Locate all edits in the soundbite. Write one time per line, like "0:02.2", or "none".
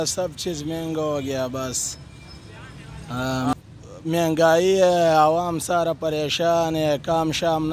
0:03.6